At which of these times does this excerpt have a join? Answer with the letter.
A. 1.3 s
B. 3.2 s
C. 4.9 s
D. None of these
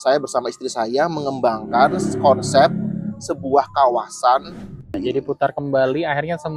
C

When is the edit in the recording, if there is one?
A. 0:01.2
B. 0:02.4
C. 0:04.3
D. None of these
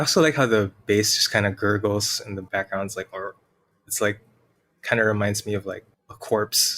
B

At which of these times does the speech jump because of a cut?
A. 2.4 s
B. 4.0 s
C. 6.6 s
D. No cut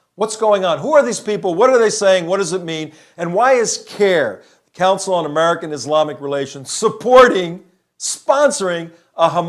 C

